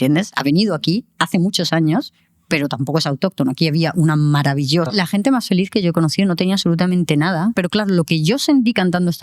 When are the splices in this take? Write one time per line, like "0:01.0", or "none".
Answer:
0:04.9
0:07.6